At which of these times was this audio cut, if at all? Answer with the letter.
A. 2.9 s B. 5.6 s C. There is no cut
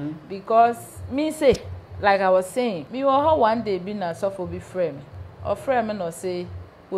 A